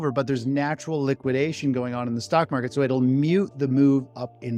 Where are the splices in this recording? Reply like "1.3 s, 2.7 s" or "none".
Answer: none